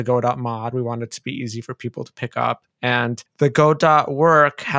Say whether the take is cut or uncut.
cut